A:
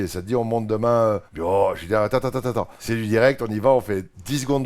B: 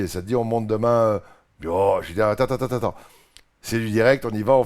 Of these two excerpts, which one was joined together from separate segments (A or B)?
A